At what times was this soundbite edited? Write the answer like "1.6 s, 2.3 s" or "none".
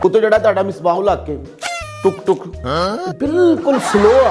none